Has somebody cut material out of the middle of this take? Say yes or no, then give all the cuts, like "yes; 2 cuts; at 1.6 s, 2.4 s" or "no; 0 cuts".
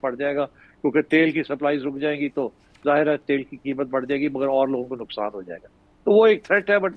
no; 0 cuts